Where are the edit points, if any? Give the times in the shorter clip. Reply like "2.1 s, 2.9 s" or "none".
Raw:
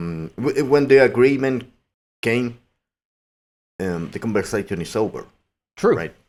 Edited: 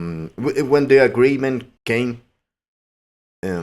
1.7 s